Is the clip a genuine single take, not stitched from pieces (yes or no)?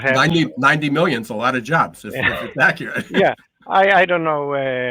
yes